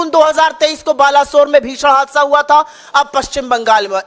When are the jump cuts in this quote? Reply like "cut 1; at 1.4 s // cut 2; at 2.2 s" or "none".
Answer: none